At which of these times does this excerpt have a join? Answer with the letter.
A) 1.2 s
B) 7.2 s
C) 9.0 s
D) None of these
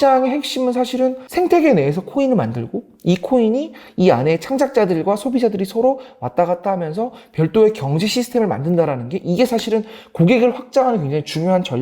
A